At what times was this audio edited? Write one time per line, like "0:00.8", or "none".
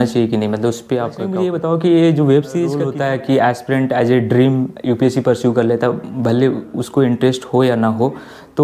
0:01.3
0:02.8